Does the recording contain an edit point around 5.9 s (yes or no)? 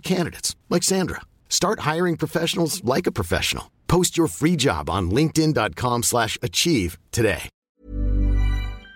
no